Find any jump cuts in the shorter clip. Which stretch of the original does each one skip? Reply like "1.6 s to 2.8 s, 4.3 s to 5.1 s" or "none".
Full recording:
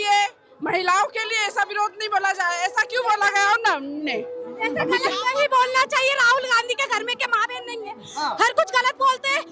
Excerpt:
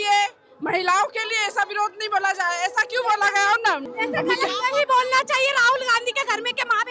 3.9 s to 4.5 s